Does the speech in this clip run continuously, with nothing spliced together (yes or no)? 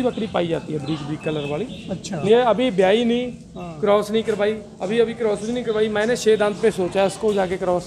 no